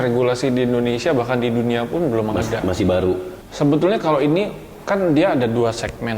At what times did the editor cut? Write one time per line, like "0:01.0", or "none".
0:03.4

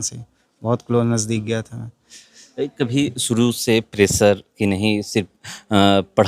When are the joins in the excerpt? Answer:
none

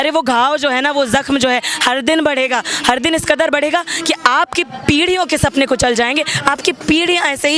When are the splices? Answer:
none

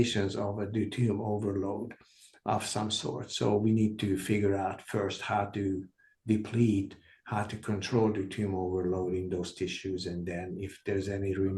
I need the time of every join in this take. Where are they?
none

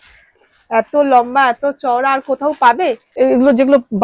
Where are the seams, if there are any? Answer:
0:03.0

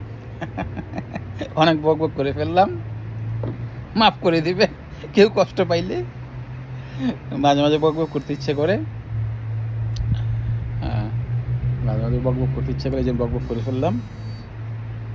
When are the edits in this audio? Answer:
none

